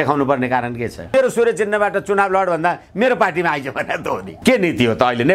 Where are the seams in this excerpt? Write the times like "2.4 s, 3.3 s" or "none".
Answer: 1.1 s, 4.3 s